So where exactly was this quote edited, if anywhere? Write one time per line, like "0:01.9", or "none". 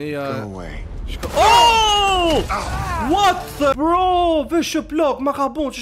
0:03.7

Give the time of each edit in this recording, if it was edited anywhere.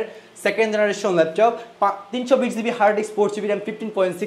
none

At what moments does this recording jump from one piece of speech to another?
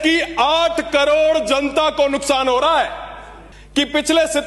0:03.3

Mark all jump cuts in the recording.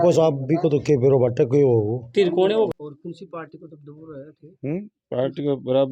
0:02.7

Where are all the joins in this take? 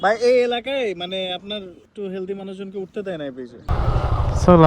0:01.9
0:03.6

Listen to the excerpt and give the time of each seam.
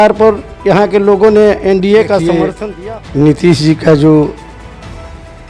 0:02.5

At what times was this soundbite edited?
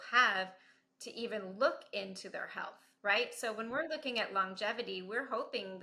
none

